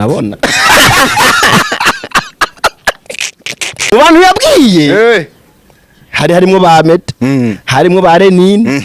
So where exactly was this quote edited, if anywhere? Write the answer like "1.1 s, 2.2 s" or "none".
3.7 s